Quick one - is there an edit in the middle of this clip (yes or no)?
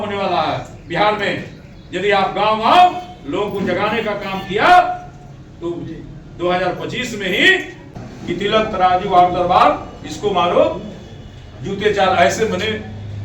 yes